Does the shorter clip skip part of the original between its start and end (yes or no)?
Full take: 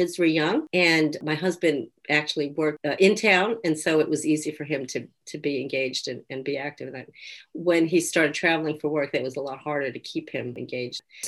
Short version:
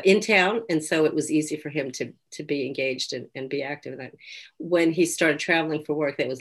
no